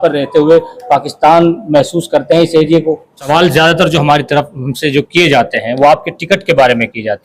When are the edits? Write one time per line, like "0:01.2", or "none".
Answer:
0:03.3